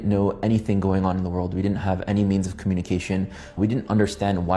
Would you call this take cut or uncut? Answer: uncut